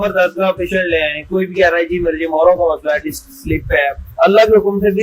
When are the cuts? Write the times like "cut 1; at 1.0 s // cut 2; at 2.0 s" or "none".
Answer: cut 1; at 4.0 s